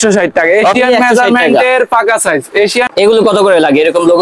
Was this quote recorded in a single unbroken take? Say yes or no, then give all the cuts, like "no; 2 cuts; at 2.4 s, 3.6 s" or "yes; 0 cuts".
no; 1 cut; at 2.9 s